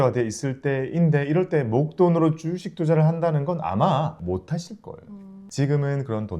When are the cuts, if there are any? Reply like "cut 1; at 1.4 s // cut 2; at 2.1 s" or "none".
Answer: cut 1; at 4.2 s // cut 2; at 5.4 s